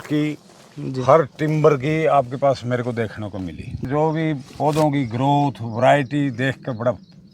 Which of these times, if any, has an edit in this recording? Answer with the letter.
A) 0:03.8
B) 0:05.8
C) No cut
A